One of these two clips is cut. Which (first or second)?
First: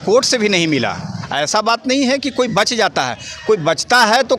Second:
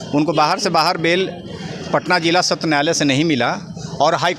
first